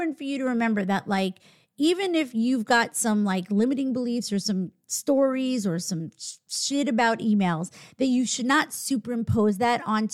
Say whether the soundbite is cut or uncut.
uncut